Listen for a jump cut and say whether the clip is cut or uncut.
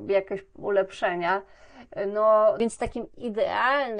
cut